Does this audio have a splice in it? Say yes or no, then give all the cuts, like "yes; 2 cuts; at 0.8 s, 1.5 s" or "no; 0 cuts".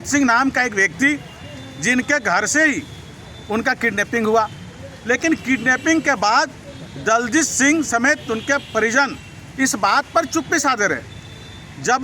no; 0 cuts